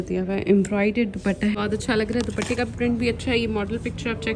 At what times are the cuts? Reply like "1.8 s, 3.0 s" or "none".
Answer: 1.5 s